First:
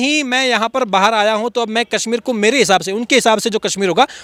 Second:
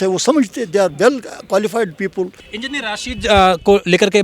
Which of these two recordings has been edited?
second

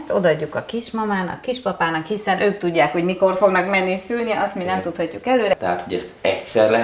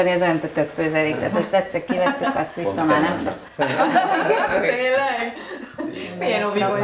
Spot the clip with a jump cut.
first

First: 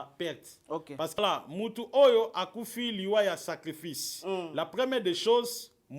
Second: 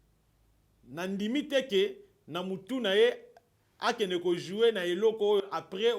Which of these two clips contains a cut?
first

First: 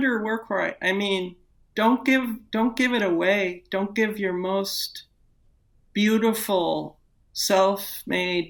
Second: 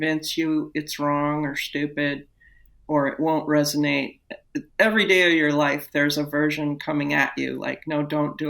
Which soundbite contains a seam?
second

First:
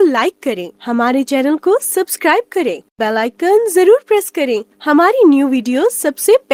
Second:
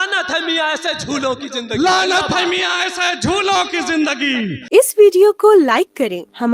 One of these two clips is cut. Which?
second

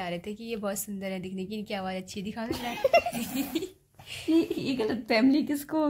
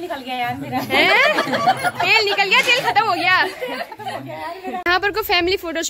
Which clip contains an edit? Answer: second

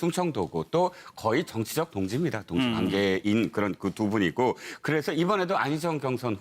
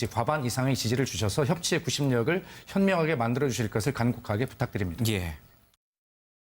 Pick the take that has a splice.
second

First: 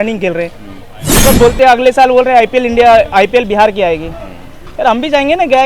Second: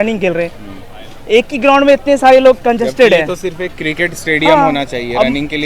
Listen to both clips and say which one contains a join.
first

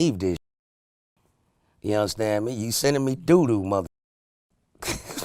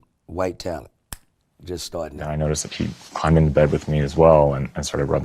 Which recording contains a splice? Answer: second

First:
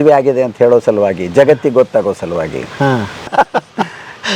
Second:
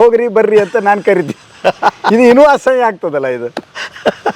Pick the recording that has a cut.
first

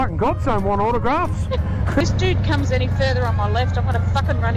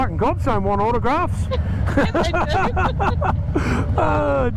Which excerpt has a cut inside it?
first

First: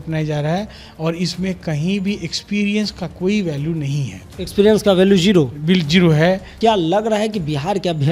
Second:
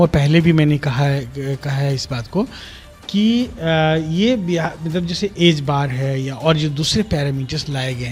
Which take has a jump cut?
first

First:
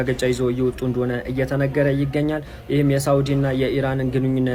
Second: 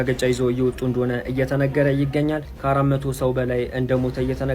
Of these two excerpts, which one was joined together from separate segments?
second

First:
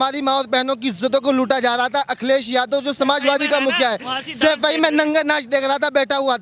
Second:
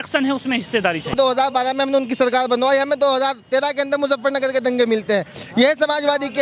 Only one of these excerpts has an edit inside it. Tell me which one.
second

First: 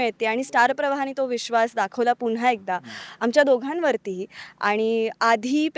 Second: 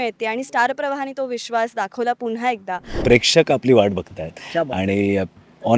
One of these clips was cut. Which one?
second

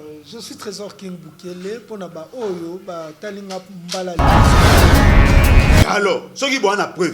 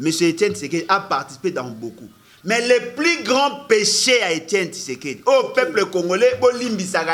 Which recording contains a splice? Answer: first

